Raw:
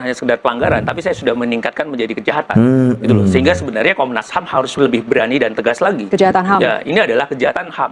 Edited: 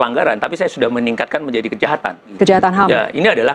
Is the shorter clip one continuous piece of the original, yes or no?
no